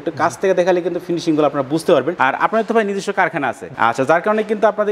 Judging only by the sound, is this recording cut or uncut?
uncut